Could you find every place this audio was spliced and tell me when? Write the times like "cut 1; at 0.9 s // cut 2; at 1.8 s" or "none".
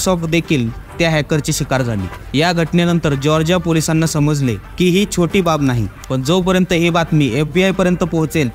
cut 1; at 5.9 s